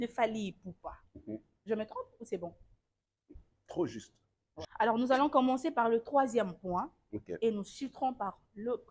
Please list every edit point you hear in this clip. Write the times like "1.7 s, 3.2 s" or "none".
4.4 s